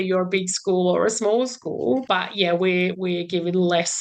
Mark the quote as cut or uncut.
cut